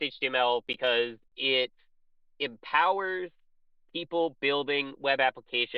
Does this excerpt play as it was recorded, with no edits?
yes; 0 cuts

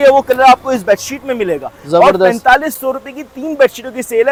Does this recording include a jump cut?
no; 0 cuts

